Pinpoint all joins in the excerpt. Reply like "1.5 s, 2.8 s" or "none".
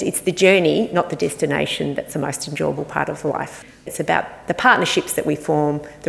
3.9 s